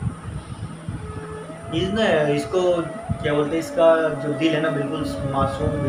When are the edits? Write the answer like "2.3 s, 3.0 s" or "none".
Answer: none